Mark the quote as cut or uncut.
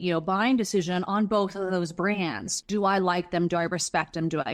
cut